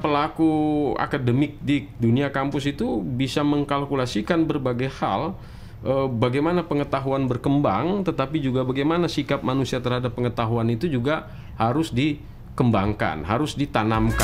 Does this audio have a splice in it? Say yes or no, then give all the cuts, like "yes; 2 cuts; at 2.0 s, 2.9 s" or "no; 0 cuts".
no; 0 cuts